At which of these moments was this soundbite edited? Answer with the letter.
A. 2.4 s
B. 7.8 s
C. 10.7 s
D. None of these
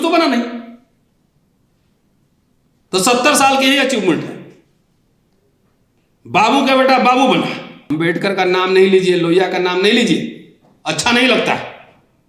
B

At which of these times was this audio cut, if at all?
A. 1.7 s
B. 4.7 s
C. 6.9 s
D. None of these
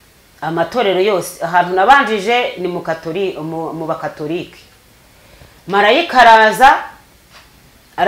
D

